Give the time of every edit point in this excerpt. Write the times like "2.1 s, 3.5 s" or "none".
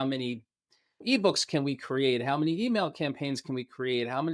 none